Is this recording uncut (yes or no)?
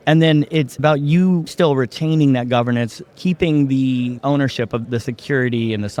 yes